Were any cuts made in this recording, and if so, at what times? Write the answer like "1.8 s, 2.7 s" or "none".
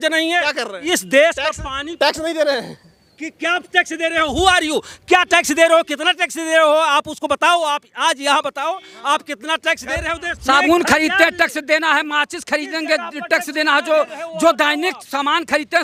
none